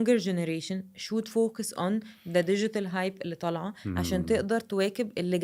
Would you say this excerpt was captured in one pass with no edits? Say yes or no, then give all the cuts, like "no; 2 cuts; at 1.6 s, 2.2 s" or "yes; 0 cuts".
yes; 0 cuts